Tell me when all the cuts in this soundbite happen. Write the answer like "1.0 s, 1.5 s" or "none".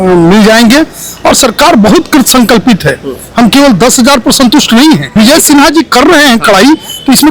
5.1 s